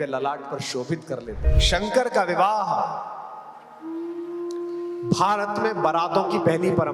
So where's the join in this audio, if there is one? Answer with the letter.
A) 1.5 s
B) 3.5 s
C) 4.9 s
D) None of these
A